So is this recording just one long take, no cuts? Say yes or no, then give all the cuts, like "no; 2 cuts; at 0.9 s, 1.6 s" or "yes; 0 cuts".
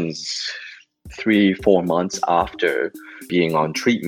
no; 1 cut; at 1.1 s